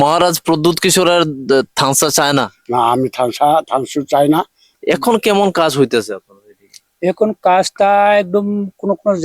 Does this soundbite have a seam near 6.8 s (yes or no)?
no